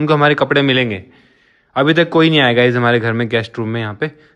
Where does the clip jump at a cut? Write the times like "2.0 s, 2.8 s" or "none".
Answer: none